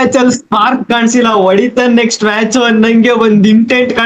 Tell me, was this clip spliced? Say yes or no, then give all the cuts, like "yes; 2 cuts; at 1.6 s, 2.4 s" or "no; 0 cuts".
no; 0 cuts